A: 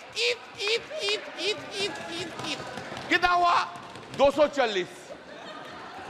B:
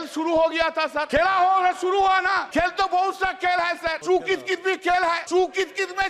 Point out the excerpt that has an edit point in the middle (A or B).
B